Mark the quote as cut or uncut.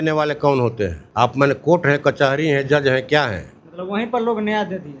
cut